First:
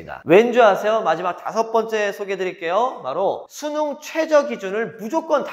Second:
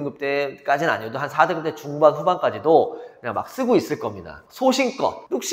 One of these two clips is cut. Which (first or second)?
second